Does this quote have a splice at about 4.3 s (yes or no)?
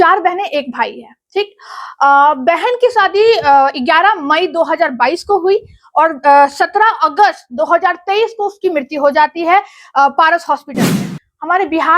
no